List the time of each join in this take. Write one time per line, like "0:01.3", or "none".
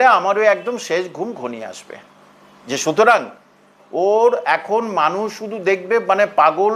none